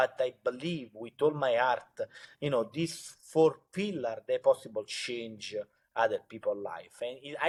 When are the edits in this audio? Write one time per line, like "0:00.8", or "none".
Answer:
none